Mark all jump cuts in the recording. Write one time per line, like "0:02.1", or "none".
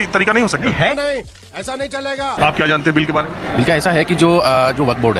0:02.3